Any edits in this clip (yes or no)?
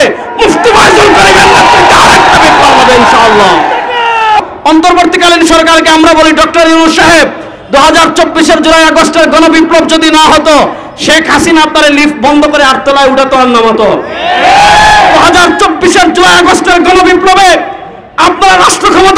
yes